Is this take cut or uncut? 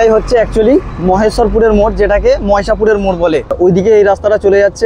cut